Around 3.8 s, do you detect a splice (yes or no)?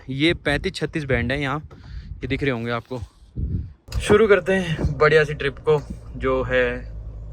yes